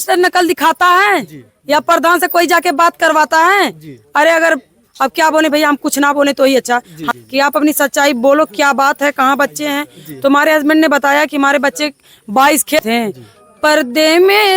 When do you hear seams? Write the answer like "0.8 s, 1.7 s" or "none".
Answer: 7.0 s, 12.8 s